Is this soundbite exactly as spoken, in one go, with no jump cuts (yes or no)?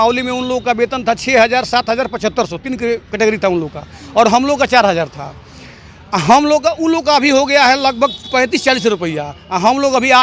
yes